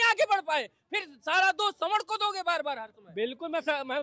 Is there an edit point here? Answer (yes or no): no